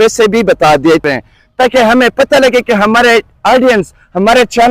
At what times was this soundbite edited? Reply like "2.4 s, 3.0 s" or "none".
1.0 s